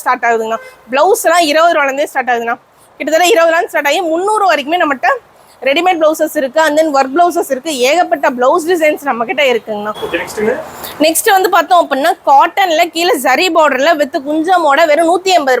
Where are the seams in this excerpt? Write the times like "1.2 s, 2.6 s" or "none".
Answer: 9.9 s